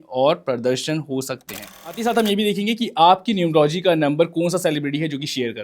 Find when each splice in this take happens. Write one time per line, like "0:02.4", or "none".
0:02.0